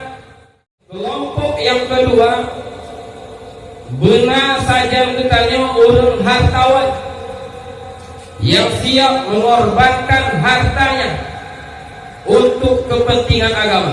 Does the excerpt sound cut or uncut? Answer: cut